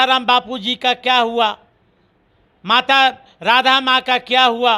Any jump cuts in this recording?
no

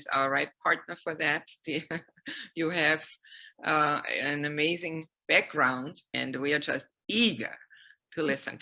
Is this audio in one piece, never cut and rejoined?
no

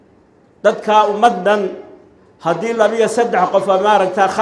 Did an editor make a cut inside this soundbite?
no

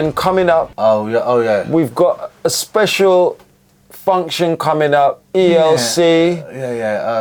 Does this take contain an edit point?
no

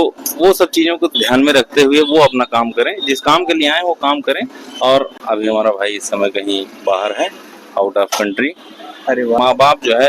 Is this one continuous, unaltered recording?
no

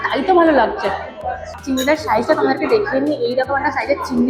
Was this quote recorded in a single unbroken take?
no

